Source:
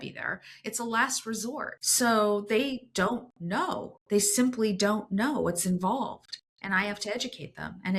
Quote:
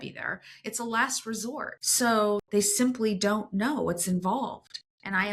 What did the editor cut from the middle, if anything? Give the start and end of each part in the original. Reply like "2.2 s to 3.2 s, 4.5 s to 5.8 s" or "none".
2.4 s to 4.0 s